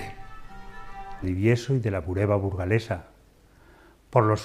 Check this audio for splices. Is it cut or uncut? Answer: uncut